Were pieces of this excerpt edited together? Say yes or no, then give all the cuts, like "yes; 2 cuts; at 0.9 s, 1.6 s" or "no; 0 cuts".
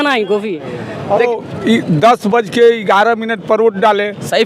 yes; 1 cut; at 1.3 s